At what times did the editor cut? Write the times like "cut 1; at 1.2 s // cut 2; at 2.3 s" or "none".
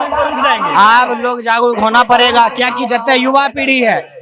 none